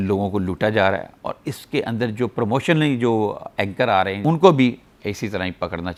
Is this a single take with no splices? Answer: yes; 0 cuts

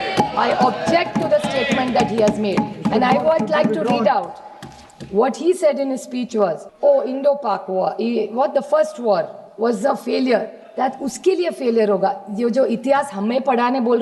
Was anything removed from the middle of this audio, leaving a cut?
yes; 1 cut; at 6.6 s

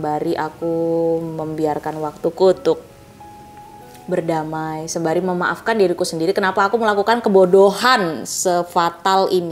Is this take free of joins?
yes; 0 cuts

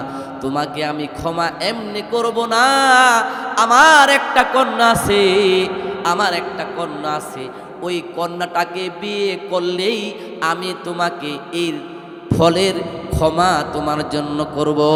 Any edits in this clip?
no; 0 cuts

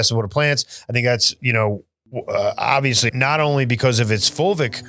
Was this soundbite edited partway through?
yes; 1 cut; at 3.1 s

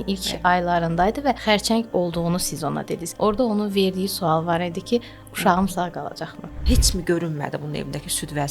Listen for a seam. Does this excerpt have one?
yes; 3 cuts; at 1.4 s, 3.0 s, 6.6 s

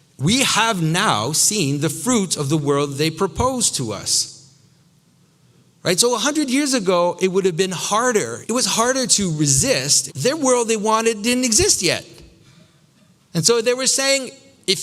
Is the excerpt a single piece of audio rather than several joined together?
no; 2 cuts; at 8.4 s, 9.9 s

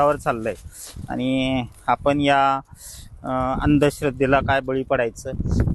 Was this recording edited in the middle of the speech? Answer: no; 0 cuts

